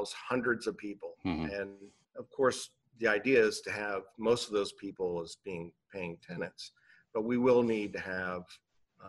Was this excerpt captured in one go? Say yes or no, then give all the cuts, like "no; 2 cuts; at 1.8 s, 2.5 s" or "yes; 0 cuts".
no; 1 cut; at 2.1 s